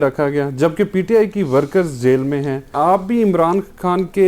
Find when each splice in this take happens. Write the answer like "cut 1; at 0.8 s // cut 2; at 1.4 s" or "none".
cut 1; at 2.7 s